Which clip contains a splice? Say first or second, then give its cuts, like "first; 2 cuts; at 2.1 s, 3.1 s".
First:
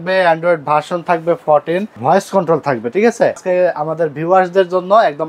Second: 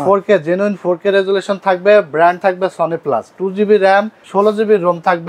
first; 2 cuts; at 2.0 s, 3.4 s